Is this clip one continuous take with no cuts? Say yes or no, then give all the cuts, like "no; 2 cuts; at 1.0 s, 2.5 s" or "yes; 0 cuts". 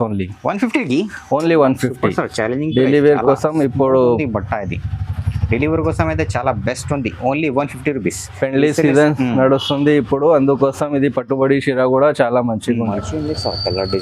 no; 1 cut; at 12.9 s